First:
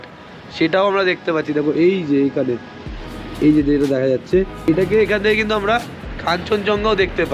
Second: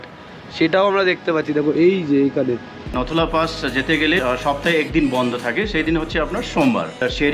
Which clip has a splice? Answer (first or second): second